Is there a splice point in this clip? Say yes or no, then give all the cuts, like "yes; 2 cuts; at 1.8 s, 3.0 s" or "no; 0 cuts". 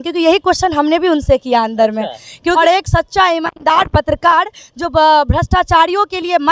yes; 1 cut; at 2.6 s